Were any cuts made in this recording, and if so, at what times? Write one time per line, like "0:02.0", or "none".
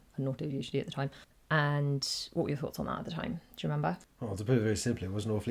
0:01.3
0:04.1